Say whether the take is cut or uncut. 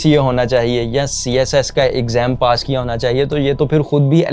uncut